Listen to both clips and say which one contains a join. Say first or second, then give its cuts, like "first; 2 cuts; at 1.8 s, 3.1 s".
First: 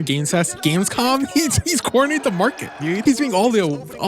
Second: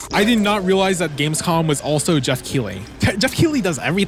first; 1 cut; at 3.0 s